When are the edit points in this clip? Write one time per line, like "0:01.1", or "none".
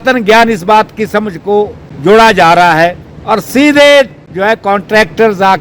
0:01.8
0:03.1
0:04.2